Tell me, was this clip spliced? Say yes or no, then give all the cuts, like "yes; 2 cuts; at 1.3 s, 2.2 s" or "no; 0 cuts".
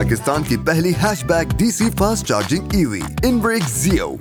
no; 0 cuts